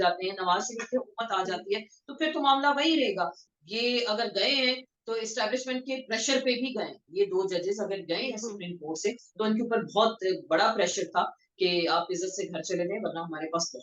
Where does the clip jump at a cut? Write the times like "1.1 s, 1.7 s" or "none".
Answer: 3.5 s